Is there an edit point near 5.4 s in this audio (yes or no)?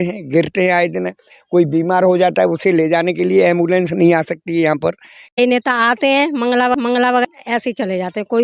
yes